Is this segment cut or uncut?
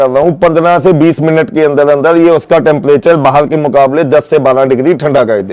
uncut